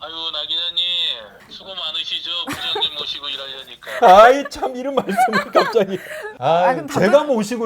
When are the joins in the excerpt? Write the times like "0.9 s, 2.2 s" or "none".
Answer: 1.4 s